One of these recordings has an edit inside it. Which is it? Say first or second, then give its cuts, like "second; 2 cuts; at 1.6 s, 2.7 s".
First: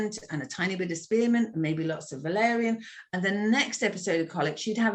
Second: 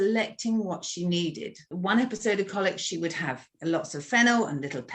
second; 2 cuts; at 1.7 s, 3.4 s